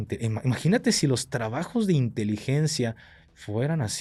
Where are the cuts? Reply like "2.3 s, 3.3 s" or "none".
none